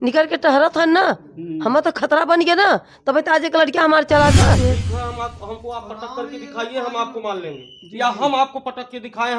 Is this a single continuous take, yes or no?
no